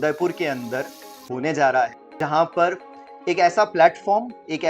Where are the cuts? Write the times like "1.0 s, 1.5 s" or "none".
2.0 s